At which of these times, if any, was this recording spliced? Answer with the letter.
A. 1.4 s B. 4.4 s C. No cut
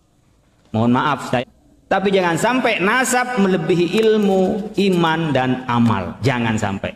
A